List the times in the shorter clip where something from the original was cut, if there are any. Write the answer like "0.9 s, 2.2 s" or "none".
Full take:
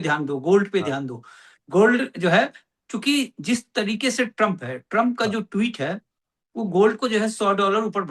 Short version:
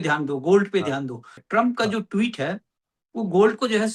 1.3 s